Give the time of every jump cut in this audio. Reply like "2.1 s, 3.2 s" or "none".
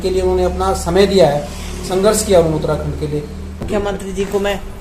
3.6 s